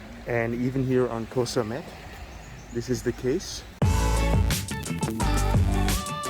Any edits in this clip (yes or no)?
yes